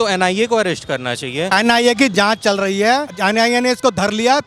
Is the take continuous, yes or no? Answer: no